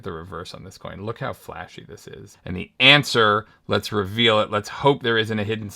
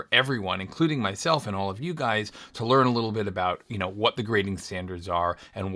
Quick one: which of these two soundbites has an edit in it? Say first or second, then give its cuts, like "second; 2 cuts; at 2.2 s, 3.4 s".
first; 1 cut; at 2.3 s